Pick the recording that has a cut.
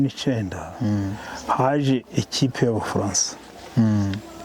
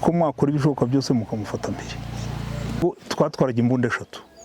second; 1 cut; at 2.8 s

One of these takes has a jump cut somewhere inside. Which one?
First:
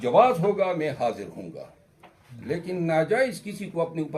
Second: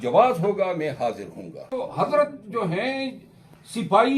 second; 1 cut; at 1.7 s

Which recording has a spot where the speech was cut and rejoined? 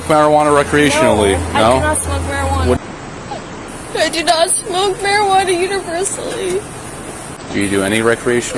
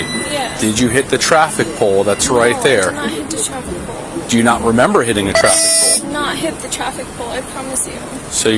first; 1 cut; at 2.8 s

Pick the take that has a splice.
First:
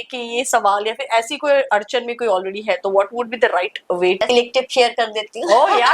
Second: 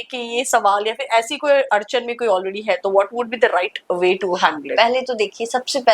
first; 1 cut; at 4.2 s

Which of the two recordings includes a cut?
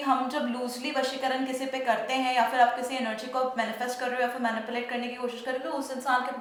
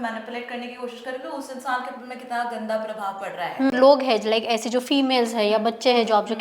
second; 1 cut; at 3.7 s

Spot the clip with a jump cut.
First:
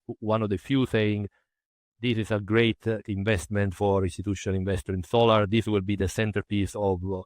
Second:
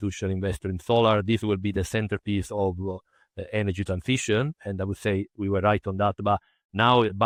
first; 2 cuts; at 1.9 s, 3.0 s

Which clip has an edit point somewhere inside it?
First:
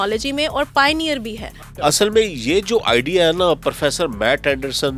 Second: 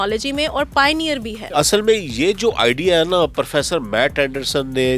second; 1 cut; at 1.4 s

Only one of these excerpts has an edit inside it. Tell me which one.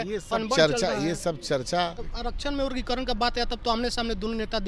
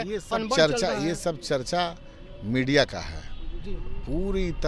first; 1 cut; at 2.1 s

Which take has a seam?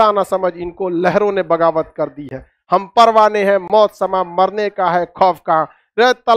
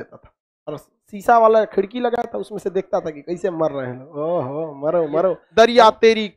second; 1 cut; at 5.4 s

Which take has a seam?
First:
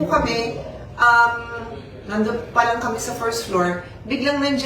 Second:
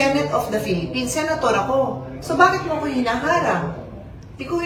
first; 1 cut; at 1.0 s

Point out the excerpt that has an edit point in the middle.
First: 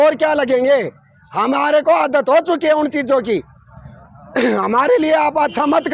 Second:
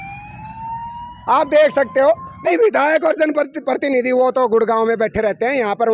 second; 1 cut; at 2.3 s

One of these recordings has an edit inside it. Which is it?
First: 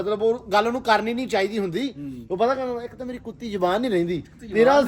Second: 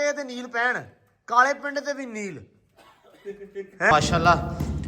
second; 1 cut; at 3.9 s

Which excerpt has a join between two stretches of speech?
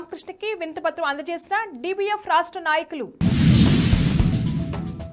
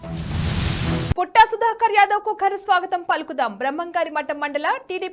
second; 1 cut; at 1.0 s

